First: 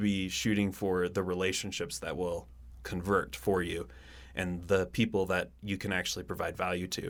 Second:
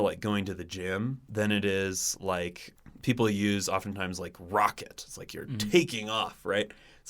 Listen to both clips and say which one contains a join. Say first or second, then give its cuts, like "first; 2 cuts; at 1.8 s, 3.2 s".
second; 2 cuts; at 1.2 s, 2.6 s